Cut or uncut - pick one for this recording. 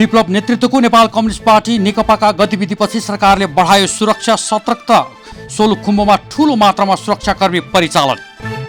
uncut